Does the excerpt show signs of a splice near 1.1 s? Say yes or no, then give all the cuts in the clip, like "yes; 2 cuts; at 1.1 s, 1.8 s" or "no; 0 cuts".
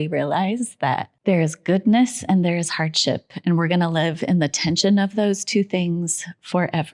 yes; 1 cut; at 1.1 s